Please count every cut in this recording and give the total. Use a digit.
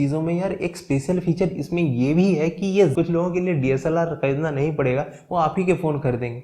1